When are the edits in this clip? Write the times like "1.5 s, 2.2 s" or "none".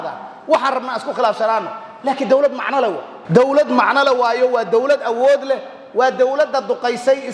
3.1 s

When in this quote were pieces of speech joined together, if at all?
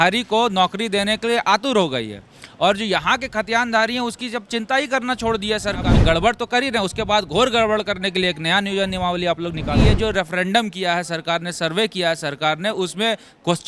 5.9 s, 9.8 s

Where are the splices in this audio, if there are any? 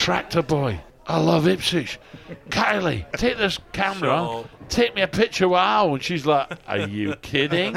0.9 s, 3.1 s

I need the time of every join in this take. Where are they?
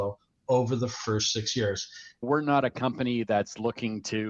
2.2 s

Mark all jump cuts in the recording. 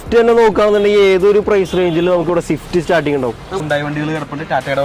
3.6 s

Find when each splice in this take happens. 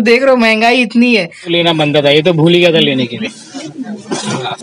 1.5 s

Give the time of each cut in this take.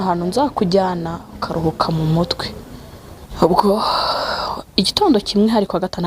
3.2 s

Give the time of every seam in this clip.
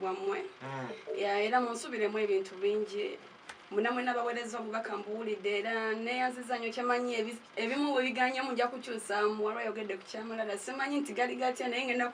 none

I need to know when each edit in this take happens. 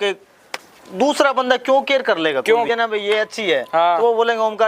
2.7 s

